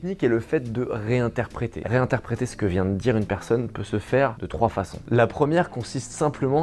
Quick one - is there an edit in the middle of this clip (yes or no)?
yes